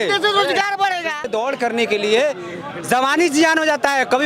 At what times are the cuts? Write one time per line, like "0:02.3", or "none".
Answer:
0:01.3